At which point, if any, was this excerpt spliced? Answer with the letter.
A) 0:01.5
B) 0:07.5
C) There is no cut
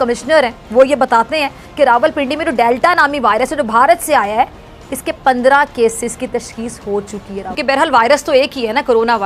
B